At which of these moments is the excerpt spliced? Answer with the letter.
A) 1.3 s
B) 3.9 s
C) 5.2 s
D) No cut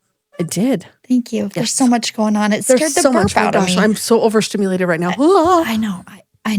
D